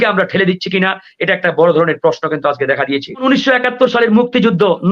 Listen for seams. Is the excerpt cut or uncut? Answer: cut